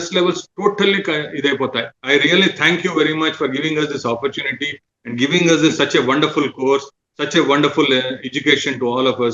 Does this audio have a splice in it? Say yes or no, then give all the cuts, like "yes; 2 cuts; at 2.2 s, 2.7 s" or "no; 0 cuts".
yes; 1 cut; at 1.9 s